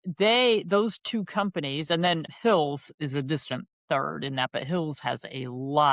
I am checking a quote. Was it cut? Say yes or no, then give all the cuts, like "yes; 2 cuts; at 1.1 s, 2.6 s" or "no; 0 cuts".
yes; 1 cut; at 2.3 s